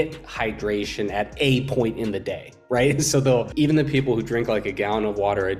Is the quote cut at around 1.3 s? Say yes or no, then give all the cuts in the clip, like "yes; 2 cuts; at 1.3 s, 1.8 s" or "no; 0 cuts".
no; 1 cut; at 3.5 s